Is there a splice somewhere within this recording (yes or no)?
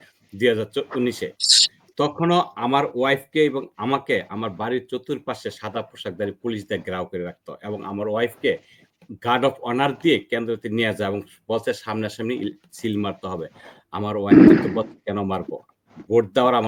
no